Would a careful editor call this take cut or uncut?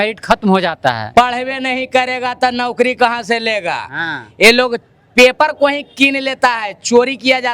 cut